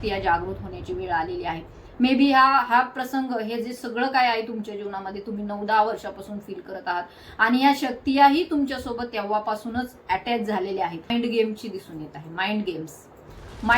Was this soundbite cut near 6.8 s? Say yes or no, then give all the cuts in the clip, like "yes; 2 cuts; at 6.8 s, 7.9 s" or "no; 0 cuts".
no; 1 cut; at 11.1 s